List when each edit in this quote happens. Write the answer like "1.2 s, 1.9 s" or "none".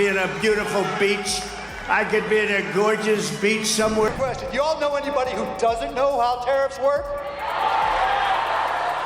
4.1 s